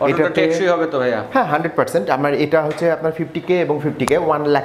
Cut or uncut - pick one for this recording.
uncut